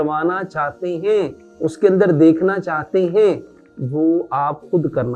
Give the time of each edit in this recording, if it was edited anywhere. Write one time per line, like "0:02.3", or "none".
0:01.4